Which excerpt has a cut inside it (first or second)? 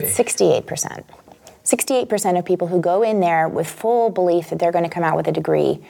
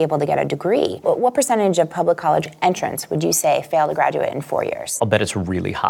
second